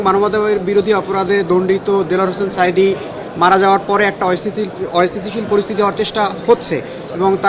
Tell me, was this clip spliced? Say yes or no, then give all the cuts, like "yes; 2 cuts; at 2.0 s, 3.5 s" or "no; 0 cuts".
no; 0 cuts